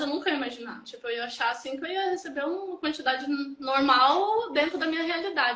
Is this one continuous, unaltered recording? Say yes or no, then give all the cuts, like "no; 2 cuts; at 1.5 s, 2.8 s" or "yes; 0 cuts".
yes; 0 cuts